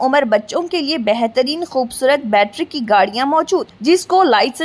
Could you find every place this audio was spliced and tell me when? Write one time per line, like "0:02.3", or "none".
none